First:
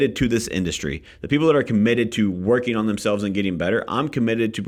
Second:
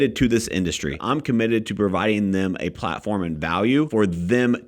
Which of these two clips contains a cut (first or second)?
second